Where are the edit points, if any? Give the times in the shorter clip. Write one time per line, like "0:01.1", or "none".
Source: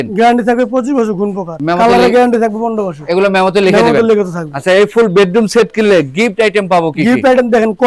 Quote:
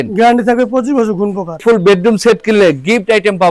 0:01.6